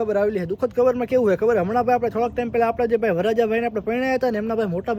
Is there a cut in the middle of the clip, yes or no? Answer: no